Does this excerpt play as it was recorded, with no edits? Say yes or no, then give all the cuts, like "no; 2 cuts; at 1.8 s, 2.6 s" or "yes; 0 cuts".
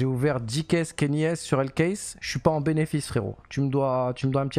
yes; 0 cuts